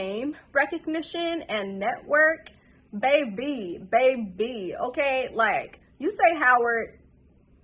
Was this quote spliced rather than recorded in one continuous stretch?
no; 0 cuts

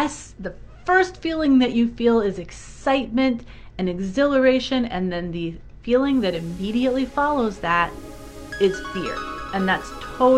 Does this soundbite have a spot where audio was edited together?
no; 0 cuts

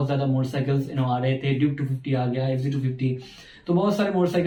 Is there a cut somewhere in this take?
no; 0 cuts

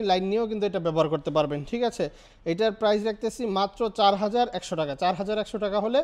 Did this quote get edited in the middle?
no; 0 cuts

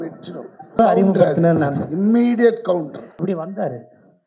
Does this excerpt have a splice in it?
yes; 2 cuts; at 0.8 s, 3.0 s

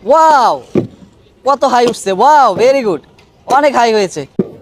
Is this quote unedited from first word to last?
yes; 0 cuts

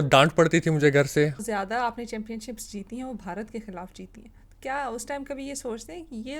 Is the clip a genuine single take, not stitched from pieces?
no; 1 cut; at 1.4 s

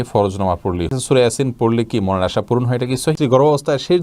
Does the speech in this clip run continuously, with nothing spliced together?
no; 2 cuts; at 0.9 s, 3.2 s

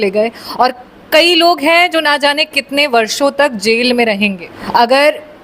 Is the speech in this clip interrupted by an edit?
yes; 1 cut; at 4.5 s

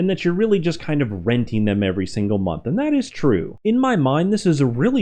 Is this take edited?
yes; 1 cut; at 3.5 s

